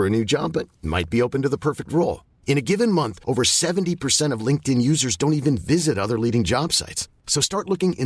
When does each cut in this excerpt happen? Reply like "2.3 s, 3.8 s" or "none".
none